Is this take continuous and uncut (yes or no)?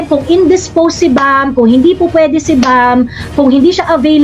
yes